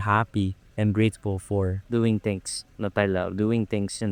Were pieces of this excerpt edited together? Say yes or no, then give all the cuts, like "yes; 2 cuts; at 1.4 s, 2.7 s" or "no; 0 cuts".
no; 0 cuts